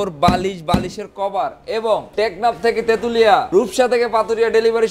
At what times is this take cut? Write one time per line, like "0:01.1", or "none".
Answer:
0:02.1
0:03.5